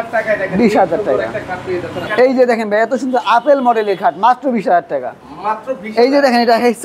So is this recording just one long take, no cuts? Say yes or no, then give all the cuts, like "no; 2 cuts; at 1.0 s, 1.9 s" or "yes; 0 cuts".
no; 1 cut; at 2.1 s